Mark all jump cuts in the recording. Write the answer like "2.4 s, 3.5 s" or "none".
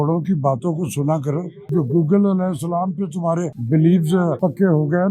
1.7 s, 3.6 s, 4.4 s